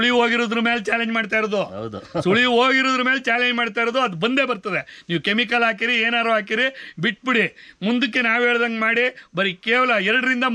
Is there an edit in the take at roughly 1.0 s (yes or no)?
no